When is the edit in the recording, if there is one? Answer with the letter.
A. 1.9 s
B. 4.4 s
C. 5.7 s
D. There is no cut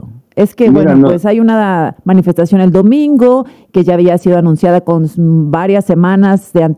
D